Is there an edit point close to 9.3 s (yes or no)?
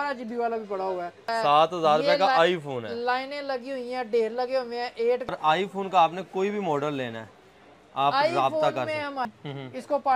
yes